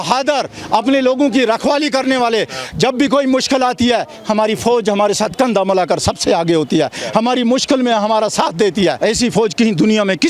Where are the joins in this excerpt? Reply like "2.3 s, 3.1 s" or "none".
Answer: 9.0 s